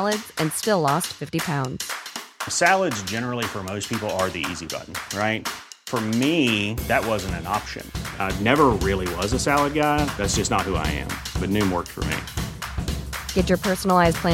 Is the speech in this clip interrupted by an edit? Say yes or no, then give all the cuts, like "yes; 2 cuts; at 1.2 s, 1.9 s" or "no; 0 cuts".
no; 0 cuts